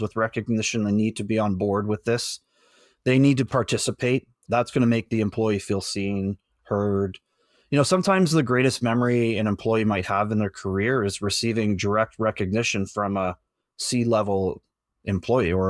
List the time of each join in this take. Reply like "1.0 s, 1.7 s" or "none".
4.3 s